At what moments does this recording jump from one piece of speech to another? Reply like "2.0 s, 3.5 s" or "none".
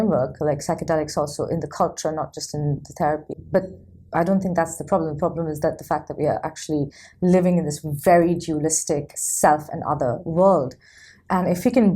3.3 s